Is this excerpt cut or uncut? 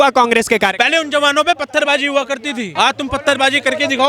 cut